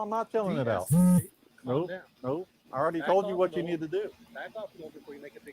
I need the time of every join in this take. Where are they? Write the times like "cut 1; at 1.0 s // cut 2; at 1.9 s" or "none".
cut 1; at 2.5 s